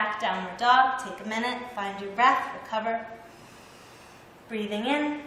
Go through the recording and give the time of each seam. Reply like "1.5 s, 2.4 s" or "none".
1.6 s